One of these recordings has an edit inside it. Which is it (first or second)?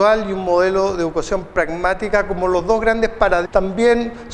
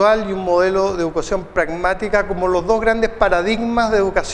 second